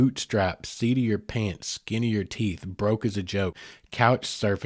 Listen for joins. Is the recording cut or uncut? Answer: cut